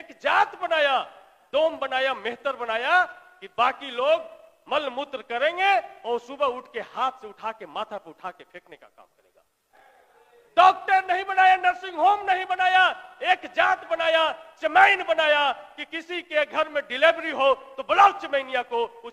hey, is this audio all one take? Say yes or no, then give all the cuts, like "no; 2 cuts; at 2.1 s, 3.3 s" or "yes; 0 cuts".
no; 1 cut; at 9.8 s